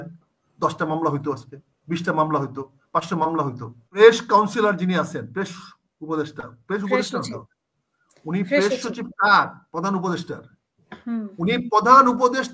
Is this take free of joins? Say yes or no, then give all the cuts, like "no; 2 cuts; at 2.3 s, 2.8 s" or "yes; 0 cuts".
no; 1 cut; at 4.0 s